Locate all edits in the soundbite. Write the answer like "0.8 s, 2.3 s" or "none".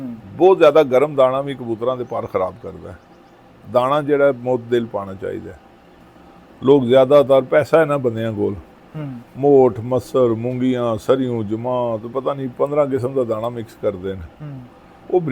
none